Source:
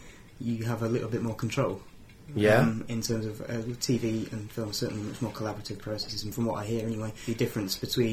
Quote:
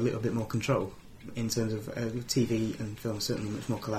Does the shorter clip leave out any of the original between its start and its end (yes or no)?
yes